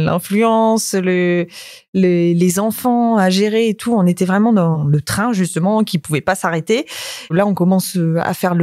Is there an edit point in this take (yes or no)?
yes